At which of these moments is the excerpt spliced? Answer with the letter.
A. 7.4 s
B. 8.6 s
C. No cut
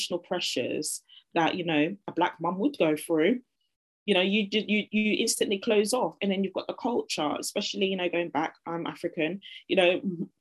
C